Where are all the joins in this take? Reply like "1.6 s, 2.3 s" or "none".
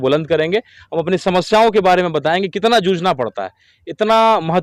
none